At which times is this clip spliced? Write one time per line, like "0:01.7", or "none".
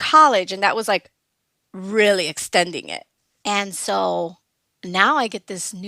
0:03.0